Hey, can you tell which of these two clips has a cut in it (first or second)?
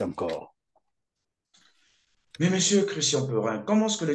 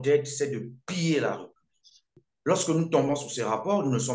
second